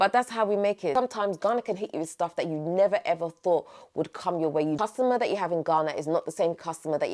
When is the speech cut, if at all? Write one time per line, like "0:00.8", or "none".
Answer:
0:00.9
0:04.8

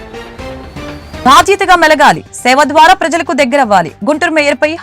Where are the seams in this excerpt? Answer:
0:01.2

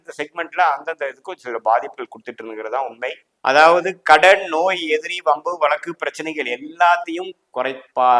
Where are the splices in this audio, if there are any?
0:03.3

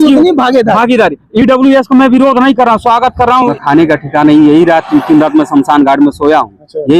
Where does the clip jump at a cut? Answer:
0:03.6

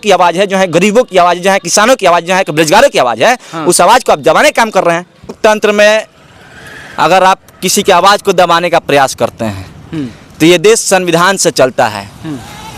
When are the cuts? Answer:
0:05.3

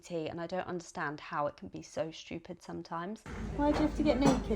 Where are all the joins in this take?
0:03.3

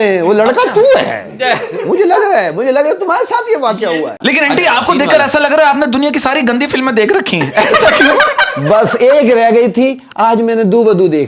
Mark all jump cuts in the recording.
0:04.2

